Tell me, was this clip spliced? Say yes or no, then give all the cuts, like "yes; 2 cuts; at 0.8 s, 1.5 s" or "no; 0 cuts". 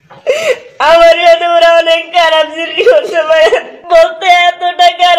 no; 0 cuts